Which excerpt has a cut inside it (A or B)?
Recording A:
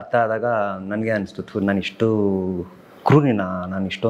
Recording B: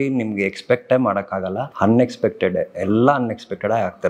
B